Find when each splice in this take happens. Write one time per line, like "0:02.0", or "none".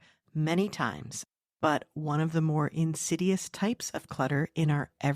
0:01.1

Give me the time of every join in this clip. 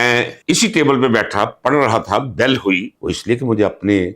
0:02.9

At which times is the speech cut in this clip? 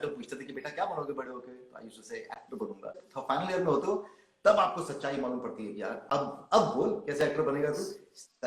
0:03.1

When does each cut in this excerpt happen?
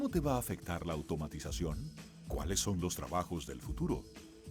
none

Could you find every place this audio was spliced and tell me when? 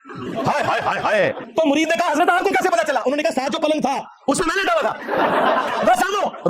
0:01.4

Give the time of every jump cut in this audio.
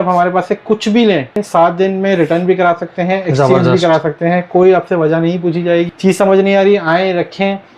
0:01.4
0:05.9

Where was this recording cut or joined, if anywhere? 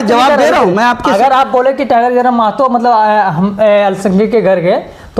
none

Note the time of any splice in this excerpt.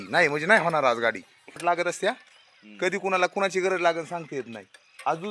0:01.5

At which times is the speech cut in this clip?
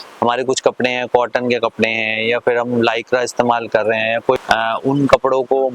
0:04.4

